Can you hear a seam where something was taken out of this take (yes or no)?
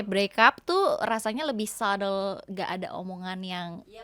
no